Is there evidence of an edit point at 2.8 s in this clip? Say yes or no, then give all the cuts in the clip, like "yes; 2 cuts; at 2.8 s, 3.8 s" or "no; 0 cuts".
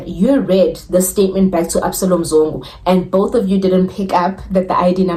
no; 0 cuts